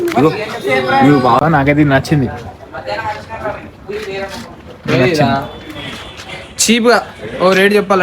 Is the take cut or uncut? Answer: cut